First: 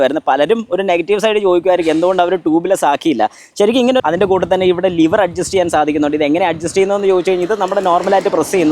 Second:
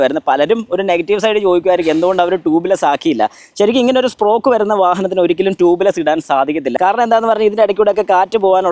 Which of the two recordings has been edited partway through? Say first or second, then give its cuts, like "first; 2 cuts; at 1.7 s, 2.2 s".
first; 1 cut; at 4.0 s